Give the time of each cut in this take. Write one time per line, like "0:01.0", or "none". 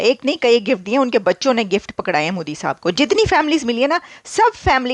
none